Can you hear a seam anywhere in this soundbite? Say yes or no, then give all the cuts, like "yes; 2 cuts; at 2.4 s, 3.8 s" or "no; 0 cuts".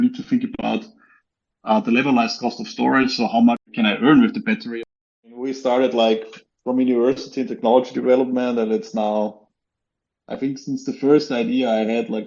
yes; 2 cuts; at 3.7 s, 4.7 s